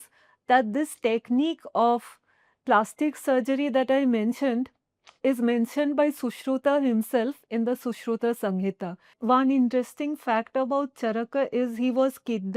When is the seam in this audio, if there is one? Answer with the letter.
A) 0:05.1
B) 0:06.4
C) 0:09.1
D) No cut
C